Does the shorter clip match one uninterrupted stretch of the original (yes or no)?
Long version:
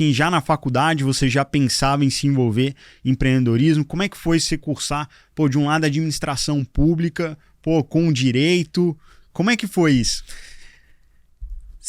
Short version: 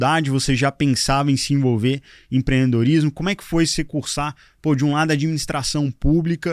yes